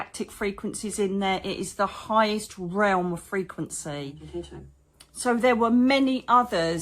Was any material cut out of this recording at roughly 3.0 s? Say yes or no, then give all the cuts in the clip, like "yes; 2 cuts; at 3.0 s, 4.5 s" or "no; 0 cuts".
no; 1 cut; at 4.3 s